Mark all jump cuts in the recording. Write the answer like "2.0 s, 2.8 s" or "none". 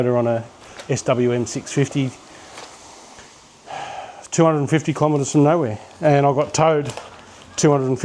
none